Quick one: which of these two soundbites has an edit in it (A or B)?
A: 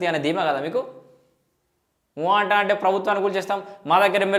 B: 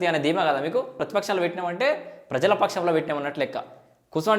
B